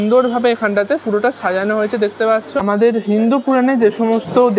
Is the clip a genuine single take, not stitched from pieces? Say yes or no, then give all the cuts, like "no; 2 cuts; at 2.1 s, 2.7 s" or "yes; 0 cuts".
no; 1 cut; at 2.6 s